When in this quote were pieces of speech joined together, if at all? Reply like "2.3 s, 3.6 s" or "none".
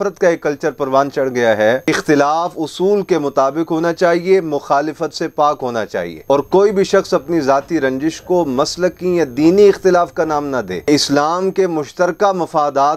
1.9 s, 6.2 s, 10.9 s